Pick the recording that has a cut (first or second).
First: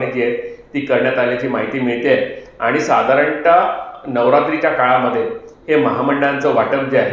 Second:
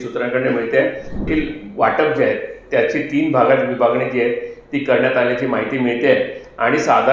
second